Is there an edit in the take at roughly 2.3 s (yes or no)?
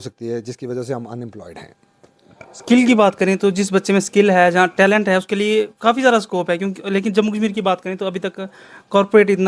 no